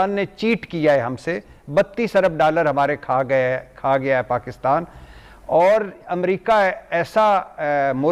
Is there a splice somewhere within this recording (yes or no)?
no